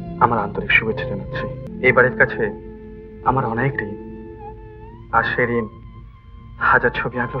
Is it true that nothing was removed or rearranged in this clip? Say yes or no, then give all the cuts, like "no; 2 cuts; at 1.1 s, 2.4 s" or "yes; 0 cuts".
no; 1 cut; at 1.7 s